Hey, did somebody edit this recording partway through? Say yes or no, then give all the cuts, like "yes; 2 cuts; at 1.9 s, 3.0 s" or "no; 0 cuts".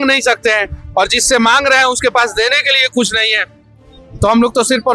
no; 0 cuts